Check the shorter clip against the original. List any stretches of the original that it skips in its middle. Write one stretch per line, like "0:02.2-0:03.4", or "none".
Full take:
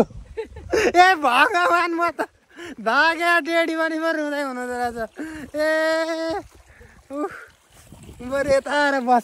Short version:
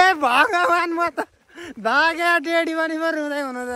none